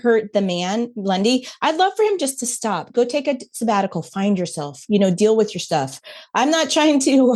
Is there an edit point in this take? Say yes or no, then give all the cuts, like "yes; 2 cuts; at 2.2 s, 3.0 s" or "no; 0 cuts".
no; 0 cuts